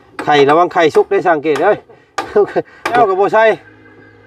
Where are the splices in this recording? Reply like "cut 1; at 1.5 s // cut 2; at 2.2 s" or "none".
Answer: cut 1; at 3.0 s